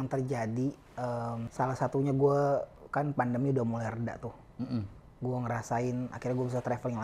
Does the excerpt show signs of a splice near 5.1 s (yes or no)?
no